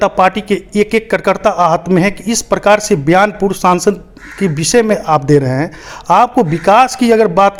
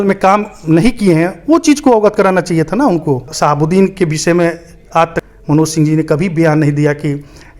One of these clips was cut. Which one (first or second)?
second